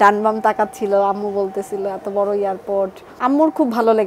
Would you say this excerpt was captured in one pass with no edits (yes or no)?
no